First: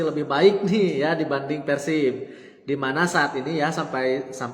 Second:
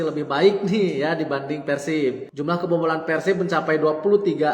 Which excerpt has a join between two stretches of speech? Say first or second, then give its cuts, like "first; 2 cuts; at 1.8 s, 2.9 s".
second; 1 cut; at 2.3 s